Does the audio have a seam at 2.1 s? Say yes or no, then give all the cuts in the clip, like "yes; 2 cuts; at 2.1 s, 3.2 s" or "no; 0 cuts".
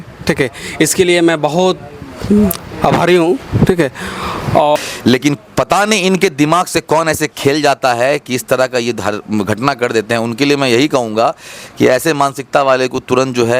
no; 1 cut; at 4.8 s